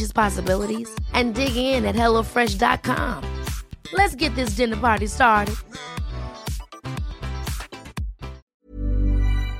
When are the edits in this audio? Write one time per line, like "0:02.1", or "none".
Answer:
0:08.4